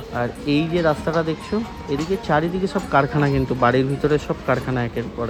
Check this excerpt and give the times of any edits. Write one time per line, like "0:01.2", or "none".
none